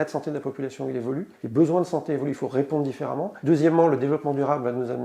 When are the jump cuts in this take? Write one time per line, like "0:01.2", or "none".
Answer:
0:01.3
0:03.3